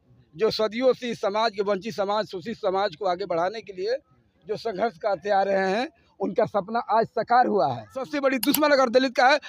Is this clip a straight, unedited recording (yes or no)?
no